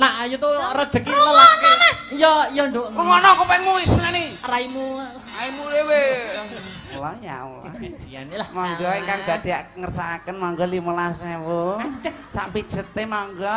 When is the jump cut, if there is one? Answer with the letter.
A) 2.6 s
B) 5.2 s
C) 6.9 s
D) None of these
C